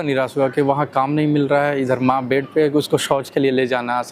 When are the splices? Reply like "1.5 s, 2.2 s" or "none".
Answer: none